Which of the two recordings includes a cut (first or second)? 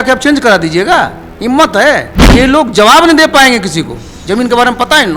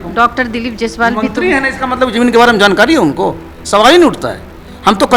first